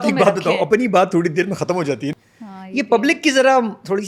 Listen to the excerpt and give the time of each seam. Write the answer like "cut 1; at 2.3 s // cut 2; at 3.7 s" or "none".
cut 1; at 2.1 s